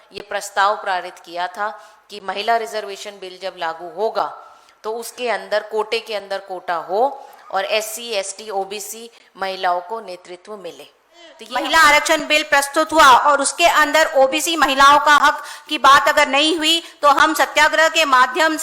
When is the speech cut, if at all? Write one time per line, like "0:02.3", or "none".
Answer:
0:11.4